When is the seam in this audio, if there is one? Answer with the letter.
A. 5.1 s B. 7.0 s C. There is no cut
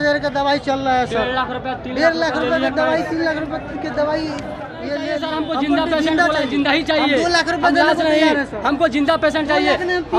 A